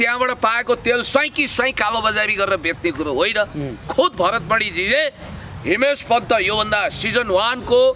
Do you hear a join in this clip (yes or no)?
yes